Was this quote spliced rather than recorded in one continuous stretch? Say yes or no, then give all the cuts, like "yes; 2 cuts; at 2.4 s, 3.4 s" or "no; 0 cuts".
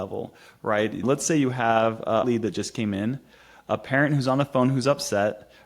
yes; 2 cuts; at 1.0 s, 2.2 s